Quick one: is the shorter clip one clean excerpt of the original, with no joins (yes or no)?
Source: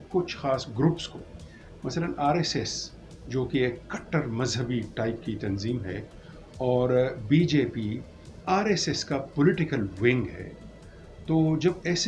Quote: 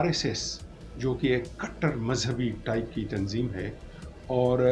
yes